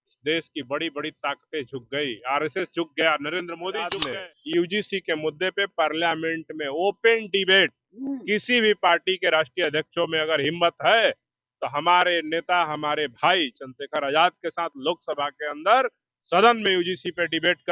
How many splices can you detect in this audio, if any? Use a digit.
1